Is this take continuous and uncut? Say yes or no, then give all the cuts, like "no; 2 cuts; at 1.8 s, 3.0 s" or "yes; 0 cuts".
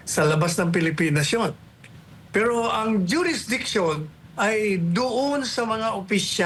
yes; 0 cuts